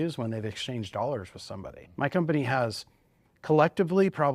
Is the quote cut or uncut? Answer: cut